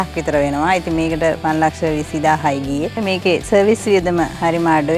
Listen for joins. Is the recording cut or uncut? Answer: cut